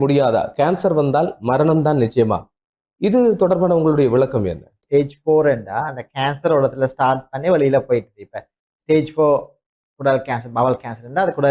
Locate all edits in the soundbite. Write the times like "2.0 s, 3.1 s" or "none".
4.8 s